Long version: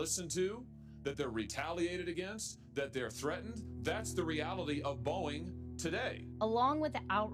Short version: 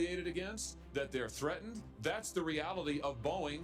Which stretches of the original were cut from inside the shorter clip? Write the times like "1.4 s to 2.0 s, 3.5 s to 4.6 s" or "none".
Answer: none